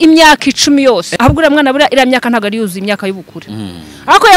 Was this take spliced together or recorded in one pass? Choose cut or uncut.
cut